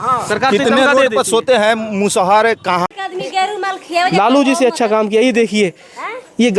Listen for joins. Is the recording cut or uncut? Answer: cut